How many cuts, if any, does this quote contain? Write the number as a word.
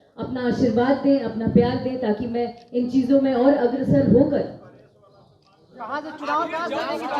zero